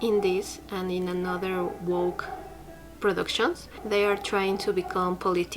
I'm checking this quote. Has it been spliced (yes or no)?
yes